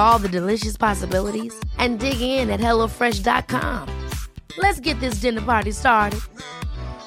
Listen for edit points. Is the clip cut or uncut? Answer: uncut